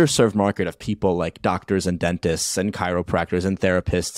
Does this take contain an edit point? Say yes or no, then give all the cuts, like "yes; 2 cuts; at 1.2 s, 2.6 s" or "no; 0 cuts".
no; 0 cuts